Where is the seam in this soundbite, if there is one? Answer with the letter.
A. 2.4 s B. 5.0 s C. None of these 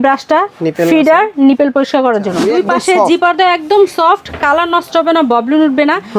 A